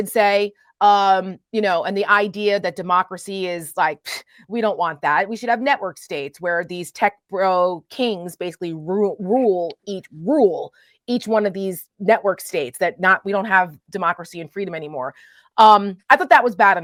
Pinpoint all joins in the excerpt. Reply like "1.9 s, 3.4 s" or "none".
none